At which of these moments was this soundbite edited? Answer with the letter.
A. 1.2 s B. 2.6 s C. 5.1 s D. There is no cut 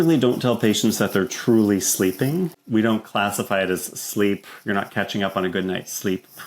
B